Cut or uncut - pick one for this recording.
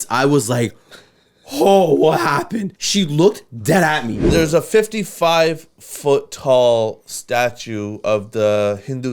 cut